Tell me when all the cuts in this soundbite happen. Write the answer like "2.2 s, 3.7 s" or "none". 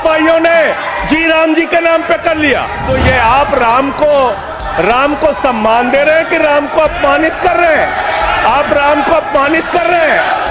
2.9 s